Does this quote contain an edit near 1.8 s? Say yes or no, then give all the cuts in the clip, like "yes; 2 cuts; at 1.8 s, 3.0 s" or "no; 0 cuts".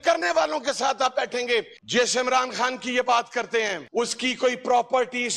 yes; 1 cut; at 1.8 s